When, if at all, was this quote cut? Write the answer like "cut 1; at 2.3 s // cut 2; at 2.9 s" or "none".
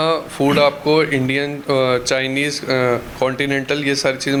none